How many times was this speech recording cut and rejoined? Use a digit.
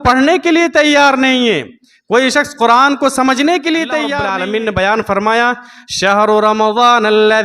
1